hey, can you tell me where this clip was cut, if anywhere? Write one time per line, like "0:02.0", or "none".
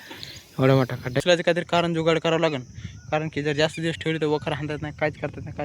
0:01.2